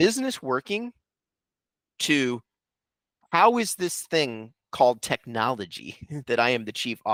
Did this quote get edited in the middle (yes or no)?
no